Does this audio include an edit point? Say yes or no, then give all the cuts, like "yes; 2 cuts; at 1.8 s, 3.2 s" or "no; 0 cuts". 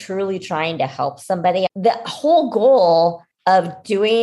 yes; 2 cuts; at 1.7 s, 3.3 s